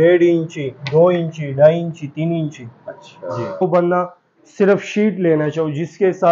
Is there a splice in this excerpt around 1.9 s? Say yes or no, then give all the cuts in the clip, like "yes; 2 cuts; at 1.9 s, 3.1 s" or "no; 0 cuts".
no; 1 cut; at 3.6 s